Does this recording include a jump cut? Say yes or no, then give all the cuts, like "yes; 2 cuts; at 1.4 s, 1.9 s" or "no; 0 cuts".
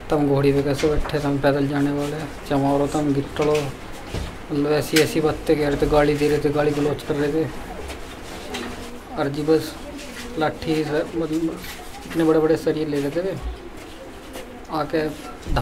no; 0 cuts